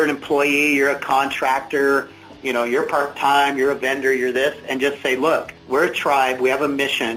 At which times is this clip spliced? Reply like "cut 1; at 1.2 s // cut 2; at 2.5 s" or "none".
none